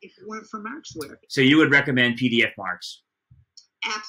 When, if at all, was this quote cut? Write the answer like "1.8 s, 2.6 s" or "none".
1.2 s